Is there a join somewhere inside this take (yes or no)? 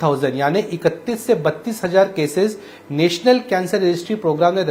no